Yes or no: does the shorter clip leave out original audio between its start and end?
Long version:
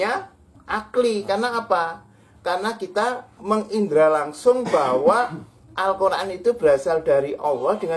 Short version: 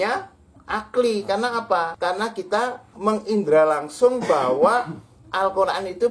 yes